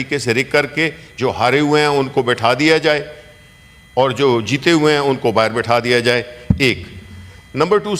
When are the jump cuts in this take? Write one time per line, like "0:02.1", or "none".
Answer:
none